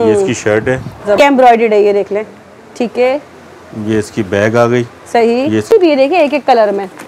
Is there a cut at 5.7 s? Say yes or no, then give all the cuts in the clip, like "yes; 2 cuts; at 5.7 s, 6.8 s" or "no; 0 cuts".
yes; 2 cuts; at 1.2 s, 5.7 s